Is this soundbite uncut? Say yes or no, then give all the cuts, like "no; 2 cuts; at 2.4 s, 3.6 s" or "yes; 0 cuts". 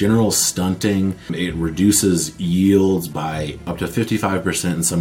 no; 2 cuts; at 1.3 s, 3.6 s